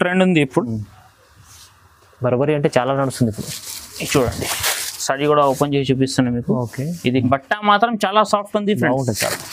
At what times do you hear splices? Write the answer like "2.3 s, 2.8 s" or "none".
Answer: 7.2 s